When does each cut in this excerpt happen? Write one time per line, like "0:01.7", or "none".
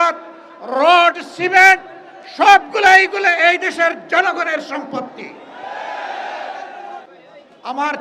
0:07.1